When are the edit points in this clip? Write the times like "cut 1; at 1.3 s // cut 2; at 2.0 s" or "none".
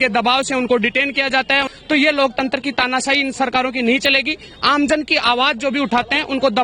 cut 1; at 1.7 s